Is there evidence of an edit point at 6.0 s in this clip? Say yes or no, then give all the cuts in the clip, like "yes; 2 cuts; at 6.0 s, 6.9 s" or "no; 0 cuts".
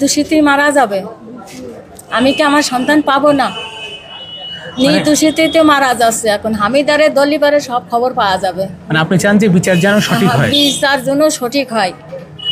no; 0 cuts